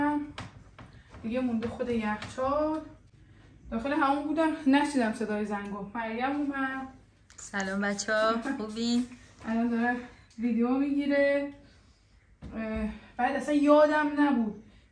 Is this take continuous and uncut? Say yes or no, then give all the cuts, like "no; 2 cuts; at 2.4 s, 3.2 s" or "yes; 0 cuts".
yes; 0 cuts